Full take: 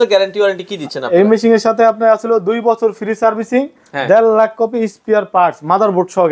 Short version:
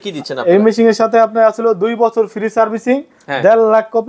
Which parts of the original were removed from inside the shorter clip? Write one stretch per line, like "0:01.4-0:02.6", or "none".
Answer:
none